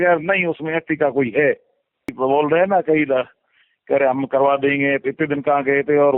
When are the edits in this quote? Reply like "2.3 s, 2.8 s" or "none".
2.1 s

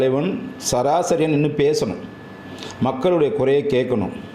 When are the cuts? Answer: none

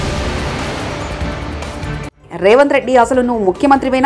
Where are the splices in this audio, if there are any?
2.2 s

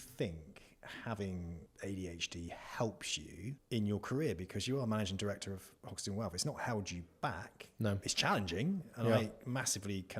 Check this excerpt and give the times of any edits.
1.7 s, 3.6 s

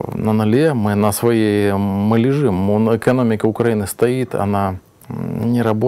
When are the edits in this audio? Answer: none

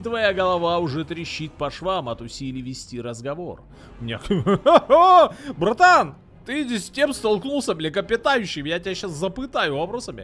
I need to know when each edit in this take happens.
none

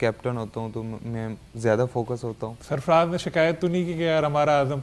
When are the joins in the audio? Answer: 1.0 s, 2.5 s

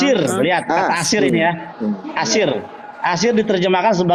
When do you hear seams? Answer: none

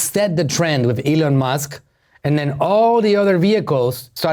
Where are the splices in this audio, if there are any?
none

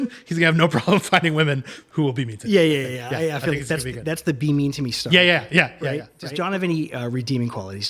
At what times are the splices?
6.3 s

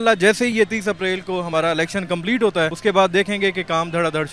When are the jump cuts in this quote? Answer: 2.8 s

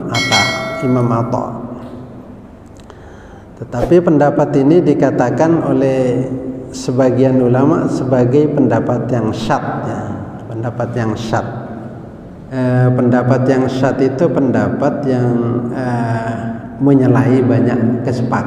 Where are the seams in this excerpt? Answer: 12.4 s

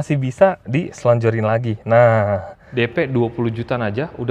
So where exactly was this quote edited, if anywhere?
2.6 s

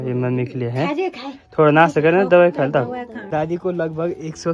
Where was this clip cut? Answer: 3.3 s

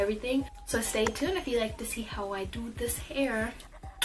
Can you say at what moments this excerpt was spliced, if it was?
3.0 s

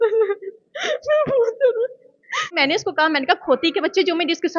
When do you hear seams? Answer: 2.6 s

